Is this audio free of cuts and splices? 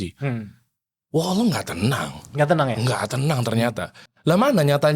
no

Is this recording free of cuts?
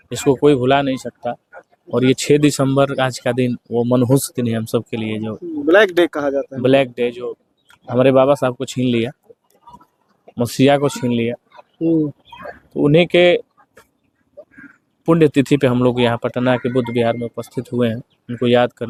yes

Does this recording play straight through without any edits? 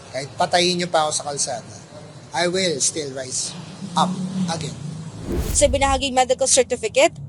no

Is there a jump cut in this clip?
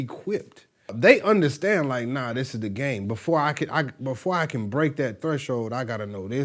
yes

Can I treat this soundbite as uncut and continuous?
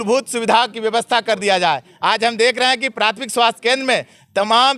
yes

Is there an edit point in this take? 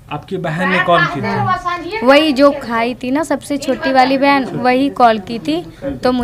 no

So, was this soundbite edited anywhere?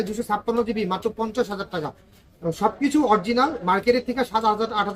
no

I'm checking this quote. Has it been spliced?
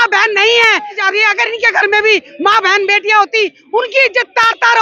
yes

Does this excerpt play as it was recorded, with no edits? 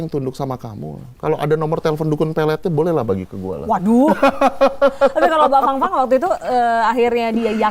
yes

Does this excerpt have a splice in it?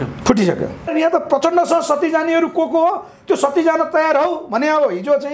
yes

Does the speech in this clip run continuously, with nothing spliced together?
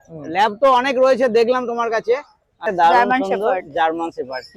no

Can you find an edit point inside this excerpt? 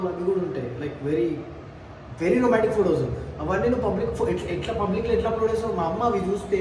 no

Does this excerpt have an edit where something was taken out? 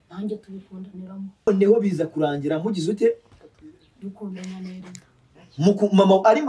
yes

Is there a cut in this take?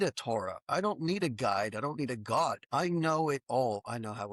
yes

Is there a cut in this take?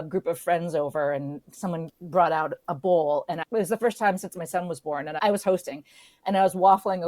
yes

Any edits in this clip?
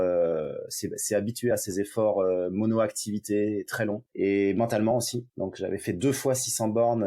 yes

